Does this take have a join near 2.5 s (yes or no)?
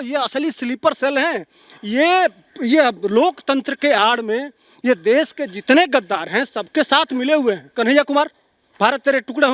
no